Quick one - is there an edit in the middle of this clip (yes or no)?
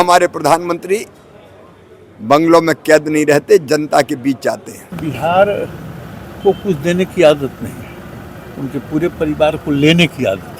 yes